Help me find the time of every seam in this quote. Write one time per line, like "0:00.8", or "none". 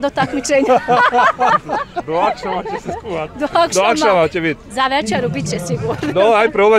none